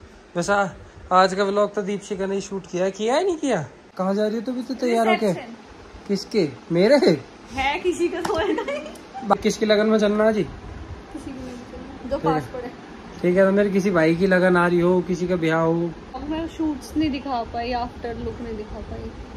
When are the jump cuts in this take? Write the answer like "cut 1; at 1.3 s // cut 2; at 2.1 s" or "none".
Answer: cut 1; at 3.8 s // cut 2; at 9.3 s // cut 3; at 16.2 s